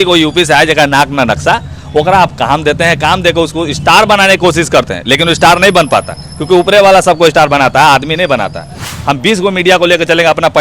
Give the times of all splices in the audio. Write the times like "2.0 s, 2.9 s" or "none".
8.9 s